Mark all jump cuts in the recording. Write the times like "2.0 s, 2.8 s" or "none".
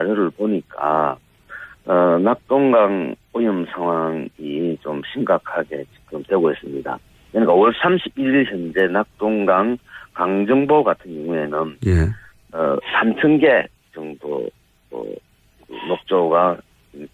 16.2 s